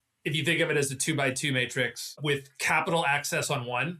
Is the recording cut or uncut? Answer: cut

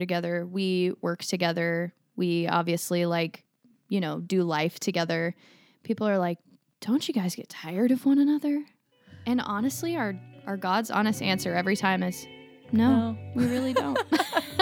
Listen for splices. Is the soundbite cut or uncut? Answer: uncut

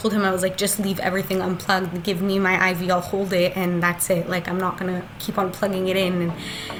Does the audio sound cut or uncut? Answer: uncut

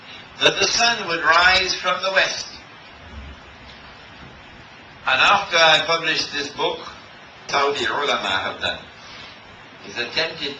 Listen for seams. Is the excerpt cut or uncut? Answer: uncut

